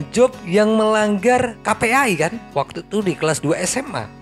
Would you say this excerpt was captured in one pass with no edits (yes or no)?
yes